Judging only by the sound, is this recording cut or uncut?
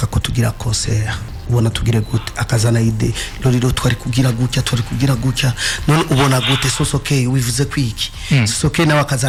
uncut